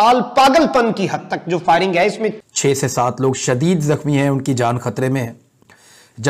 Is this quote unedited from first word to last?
no; 1 cut; at 2.4 s

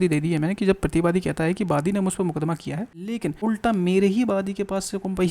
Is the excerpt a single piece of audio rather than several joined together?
no; 1 cut; at 3.2 s

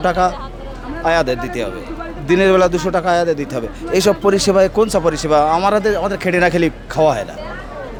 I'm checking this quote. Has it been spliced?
no; 0 cuts

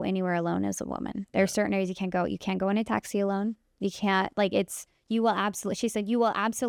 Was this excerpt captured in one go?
yes; 0 cuts

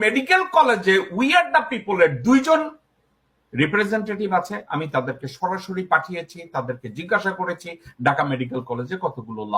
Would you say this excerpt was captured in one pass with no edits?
yes; 0 cuts

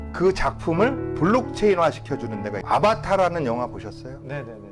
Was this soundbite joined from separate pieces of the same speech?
yes; 1 cut; at 2.6 s

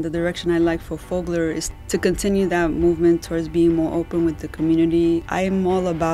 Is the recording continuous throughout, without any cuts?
no; 2 cuts; at 1.7 s, 5.2 s

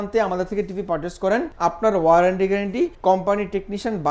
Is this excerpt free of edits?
no; 2 cuts; at 1.5 s, 2.9 s

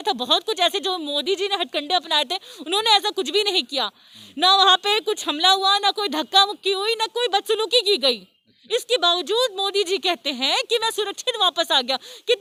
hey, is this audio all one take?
yes; 0 cuts

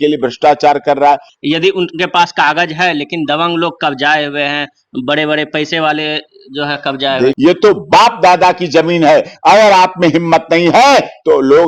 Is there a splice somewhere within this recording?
yes; 2 cuts; at 1.3 s, 7.4 s

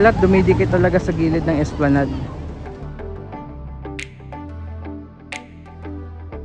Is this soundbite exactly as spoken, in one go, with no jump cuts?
no; 1 cut; at 2.5 s

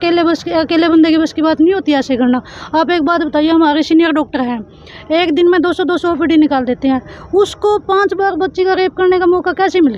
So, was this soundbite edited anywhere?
no; 0 cuts

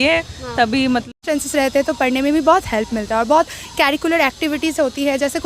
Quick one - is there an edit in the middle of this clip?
yes; 1 cut; at 1.2 s

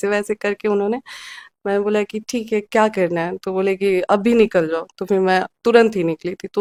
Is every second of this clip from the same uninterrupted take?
yes; 0 cuts

